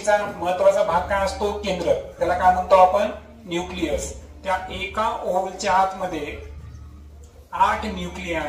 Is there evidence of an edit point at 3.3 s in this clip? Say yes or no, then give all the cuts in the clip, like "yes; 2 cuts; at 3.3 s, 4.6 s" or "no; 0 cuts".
no; 0 cuts